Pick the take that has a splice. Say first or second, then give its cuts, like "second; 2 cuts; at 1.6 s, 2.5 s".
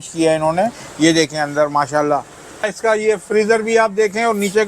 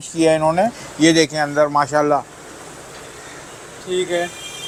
first; 1 cut; at 2.7 s